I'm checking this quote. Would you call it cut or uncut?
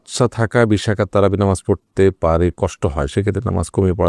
uncut